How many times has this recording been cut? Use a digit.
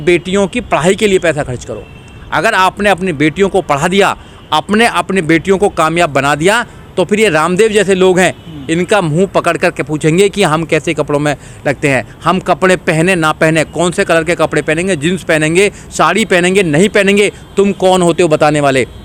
0